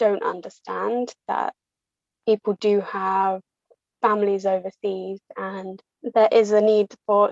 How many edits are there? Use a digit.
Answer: 1